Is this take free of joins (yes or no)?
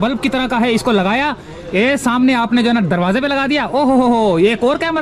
yes